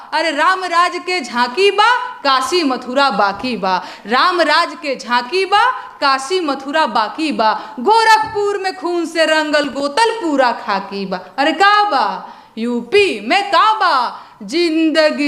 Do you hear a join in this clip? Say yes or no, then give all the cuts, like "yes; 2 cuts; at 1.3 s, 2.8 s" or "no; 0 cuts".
no; 0 cuts